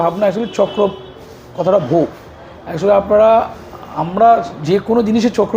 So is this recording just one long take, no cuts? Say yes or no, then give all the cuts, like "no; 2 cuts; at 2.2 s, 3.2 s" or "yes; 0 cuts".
yes; 0 cuts